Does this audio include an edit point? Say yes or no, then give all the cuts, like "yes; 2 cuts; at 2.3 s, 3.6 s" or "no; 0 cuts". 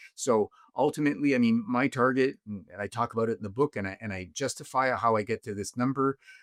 no; 0 cuts